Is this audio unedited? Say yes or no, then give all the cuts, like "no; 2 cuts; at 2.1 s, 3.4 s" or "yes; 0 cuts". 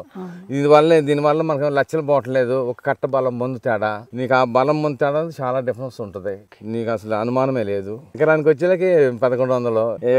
yes; 0 cuts